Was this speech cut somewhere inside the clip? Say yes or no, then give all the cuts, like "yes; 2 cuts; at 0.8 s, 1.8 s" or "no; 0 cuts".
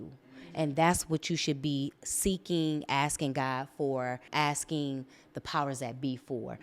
yes; 1 cut; at 4.2 s